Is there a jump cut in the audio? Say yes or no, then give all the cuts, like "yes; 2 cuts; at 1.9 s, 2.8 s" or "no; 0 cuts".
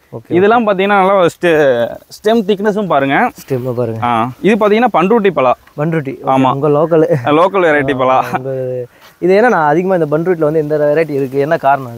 yes; 1 cut; at 4.5 s